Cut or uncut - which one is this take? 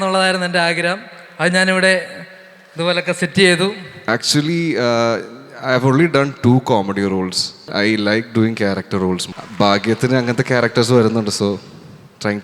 cut